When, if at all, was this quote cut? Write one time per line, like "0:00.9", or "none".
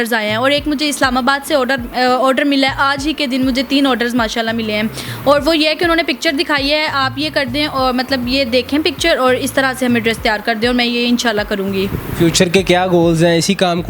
none